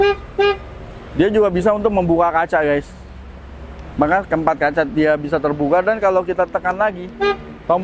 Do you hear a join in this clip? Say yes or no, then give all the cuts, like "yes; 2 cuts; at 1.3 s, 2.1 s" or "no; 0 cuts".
no; 0 cuts